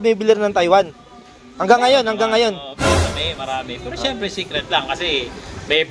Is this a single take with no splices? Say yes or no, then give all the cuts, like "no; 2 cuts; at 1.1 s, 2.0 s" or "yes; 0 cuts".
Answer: yes; 0 cuts